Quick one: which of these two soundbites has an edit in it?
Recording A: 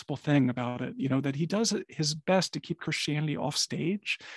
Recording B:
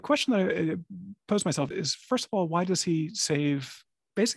B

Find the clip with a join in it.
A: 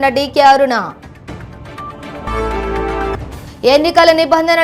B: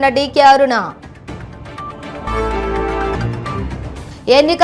A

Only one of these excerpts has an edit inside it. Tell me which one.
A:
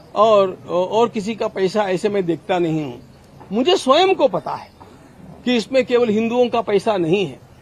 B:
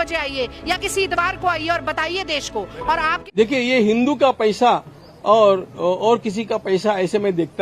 B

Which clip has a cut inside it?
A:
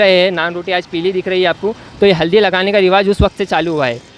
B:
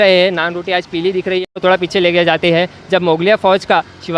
B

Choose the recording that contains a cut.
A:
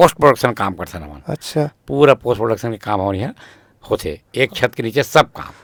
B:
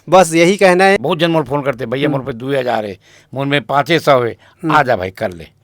B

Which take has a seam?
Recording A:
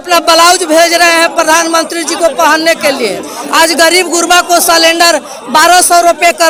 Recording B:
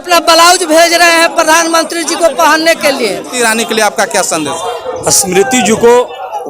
B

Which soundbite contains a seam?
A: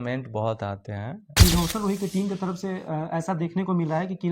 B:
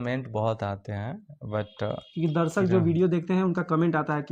A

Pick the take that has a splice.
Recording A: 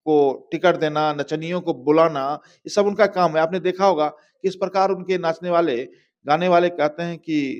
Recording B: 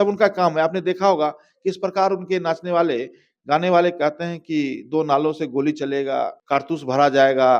B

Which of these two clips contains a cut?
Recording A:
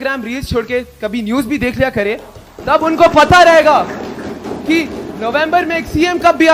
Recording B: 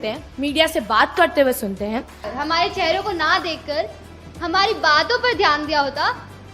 B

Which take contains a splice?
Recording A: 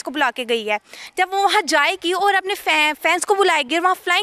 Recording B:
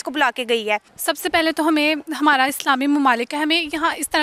B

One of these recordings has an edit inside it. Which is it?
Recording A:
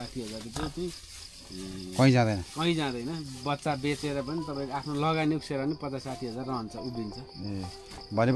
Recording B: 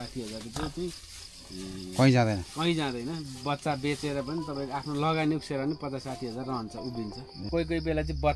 B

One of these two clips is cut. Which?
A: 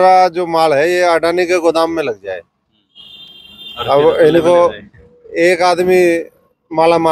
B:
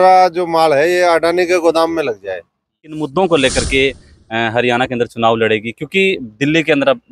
B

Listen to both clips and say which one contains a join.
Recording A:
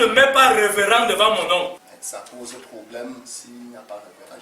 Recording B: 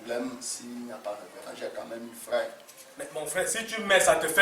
A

